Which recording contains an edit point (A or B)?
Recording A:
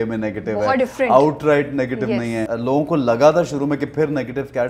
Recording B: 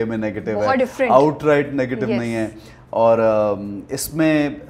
A